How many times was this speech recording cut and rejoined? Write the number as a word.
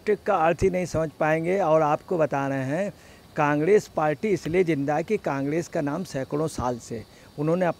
zero